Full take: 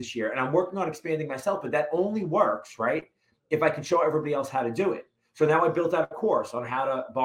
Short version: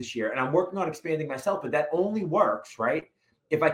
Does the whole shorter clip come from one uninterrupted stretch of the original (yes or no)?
yes